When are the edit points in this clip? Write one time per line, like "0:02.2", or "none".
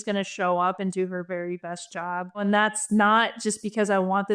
0:02.4

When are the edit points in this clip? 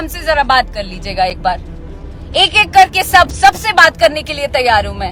none

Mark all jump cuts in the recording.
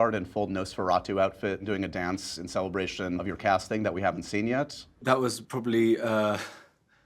0:01.6
0:03.2
0:04.9

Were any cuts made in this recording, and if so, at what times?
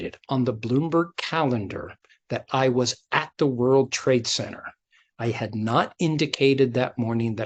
none

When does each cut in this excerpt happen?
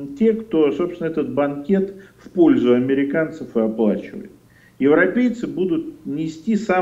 none

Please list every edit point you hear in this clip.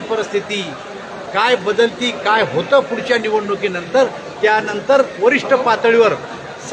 none

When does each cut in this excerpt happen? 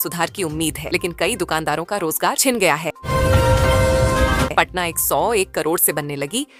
none

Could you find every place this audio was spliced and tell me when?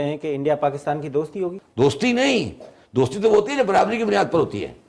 0:01.6

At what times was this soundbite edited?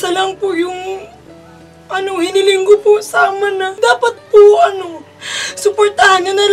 0:03.7

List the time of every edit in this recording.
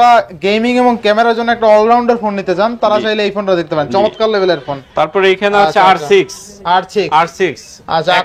none

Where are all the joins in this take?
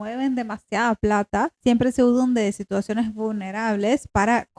0:01.5

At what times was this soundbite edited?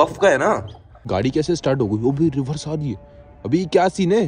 0:01.1
0:03.3

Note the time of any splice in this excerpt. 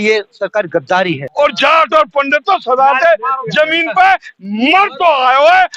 0:01.2

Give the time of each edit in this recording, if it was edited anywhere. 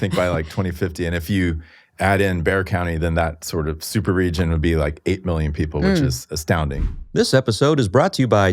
0:06.9

